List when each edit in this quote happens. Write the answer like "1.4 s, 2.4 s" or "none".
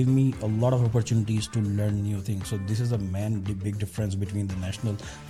none